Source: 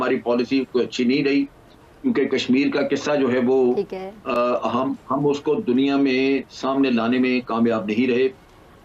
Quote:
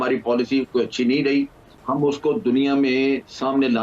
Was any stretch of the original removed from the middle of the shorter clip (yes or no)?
yes